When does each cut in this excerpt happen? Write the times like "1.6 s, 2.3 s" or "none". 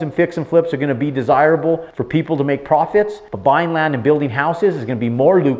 1.9 s, 3.2 s